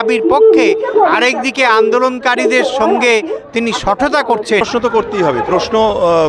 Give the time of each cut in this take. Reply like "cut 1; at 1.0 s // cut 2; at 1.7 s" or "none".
cut 1; at 4.6 s

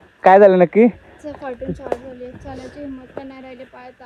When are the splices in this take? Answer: none

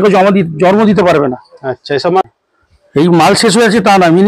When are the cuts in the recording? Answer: cut 1; at 2.2 s

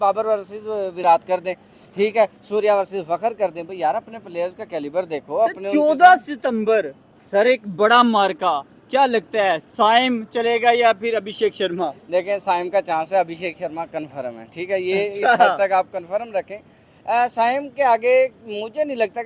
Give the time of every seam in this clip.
none

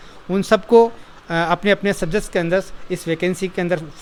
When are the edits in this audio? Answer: none

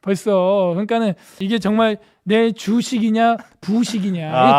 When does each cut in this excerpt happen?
cut 1; at 1.4 s

